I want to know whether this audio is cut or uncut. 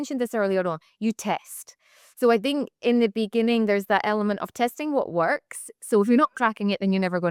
uncut